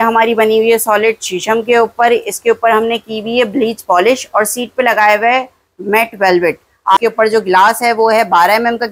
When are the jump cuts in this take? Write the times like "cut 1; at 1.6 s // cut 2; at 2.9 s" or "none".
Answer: cut 1; at 7.0 s